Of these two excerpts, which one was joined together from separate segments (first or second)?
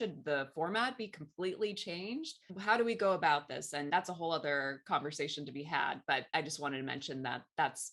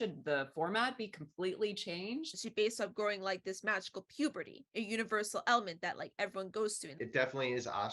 second